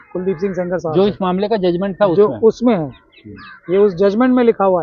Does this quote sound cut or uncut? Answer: uncut